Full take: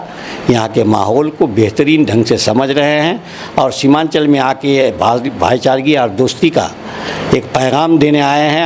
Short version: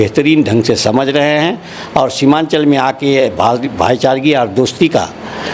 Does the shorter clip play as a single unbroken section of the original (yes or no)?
yes